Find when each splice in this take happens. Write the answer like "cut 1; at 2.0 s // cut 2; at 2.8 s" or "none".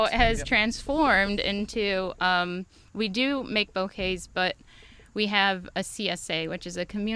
none

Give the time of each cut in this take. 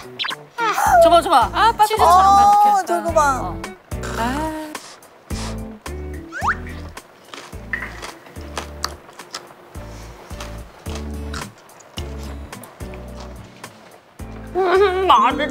none

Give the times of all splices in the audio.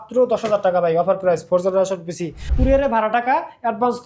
cut 1; at 2.5 s

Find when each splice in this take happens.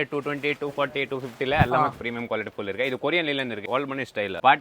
cut 1; at 3.7 s

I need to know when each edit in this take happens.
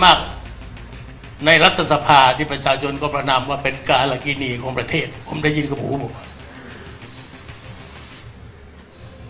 none

